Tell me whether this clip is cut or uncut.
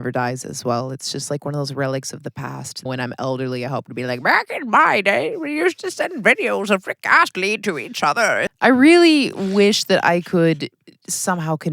cut